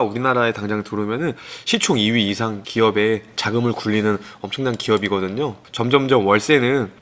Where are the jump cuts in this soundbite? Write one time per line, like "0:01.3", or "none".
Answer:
0:02.6
0:05.6